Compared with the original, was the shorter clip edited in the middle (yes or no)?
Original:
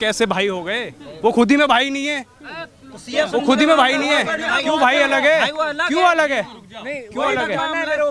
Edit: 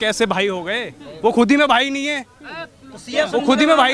no